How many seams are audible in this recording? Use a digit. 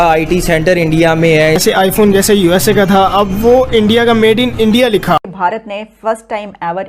2